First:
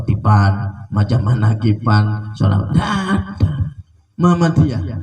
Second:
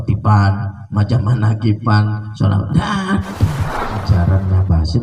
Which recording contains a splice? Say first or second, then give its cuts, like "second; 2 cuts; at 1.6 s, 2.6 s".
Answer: second; 1 cut; at 4.0 s